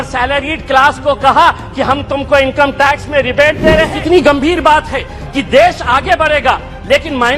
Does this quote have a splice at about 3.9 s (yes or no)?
yes